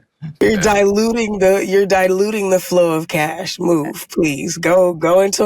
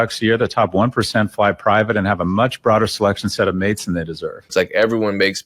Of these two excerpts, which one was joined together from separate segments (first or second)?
second